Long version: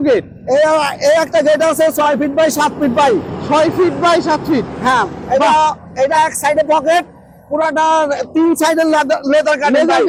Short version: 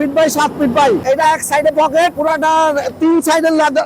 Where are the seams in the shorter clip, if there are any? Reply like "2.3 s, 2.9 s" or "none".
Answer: 1.0 s, 2.1 s

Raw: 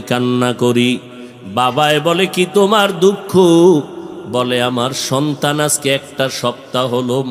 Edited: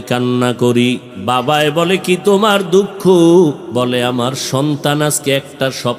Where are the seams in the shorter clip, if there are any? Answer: 1.1 s, 3.6 s

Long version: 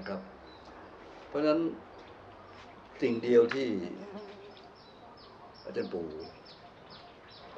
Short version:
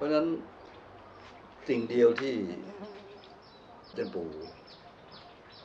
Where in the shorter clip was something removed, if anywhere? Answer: 3.9 s

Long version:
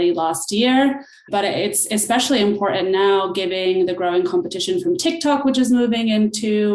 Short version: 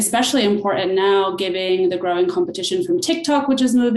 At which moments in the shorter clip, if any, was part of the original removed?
none

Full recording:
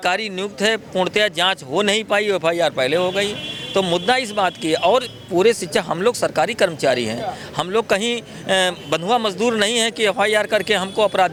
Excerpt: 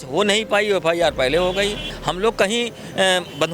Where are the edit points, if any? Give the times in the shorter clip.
1.9 s

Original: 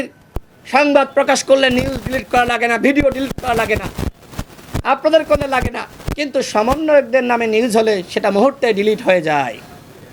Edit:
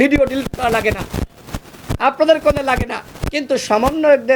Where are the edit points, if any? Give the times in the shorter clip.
none

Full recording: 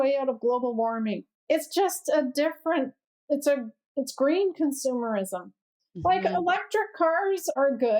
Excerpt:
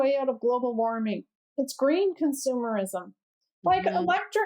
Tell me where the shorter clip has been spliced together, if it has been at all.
1.3 s

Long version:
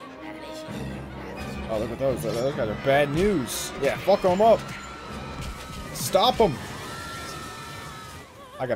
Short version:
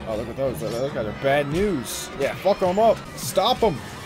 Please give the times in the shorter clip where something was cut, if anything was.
3.1 s

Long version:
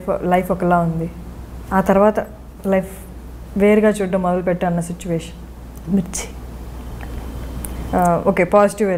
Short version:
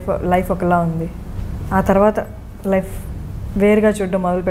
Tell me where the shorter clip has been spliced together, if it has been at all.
none

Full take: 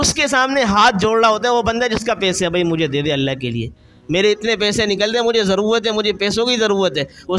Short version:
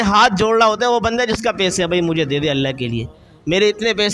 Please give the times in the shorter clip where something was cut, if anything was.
none

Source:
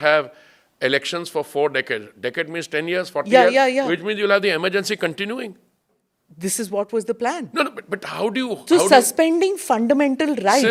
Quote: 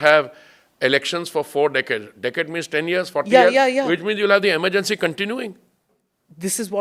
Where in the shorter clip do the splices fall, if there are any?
none

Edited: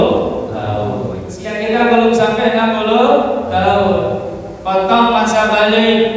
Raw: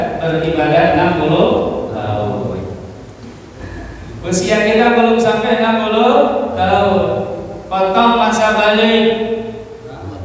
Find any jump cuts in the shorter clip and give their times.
1.6 s

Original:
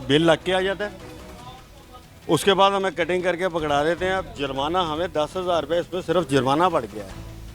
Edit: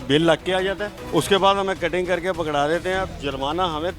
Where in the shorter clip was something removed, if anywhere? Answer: 0.9 s

